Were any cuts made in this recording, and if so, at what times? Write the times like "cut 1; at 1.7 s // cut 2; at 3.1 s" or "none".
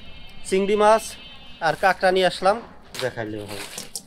cut 1; at 3.0 s